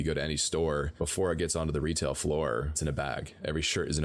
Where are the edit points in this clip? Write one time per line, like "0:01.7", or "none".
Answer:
0:00.9
0:02.8